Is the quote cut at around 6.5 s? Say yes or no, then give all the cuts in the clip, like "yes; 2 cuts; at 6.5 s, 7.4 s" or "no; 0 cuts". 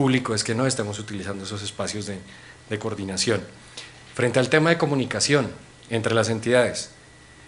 no; 1 cut; at 5.1 s